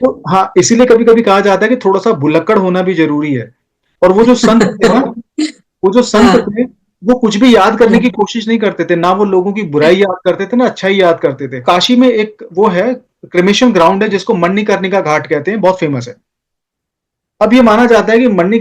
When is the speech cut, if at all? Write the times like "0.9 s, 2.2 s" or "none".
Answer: 11.6 s